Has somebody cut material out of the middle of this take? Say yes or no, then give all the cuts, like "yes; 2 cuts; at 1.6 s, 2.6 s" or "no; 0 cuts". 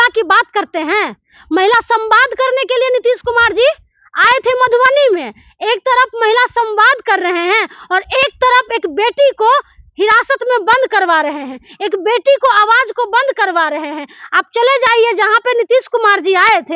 no; 0 cuts